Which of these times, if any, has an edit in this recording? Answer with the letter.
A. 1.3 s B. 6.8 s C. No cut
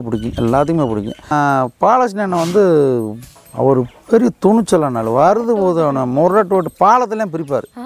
A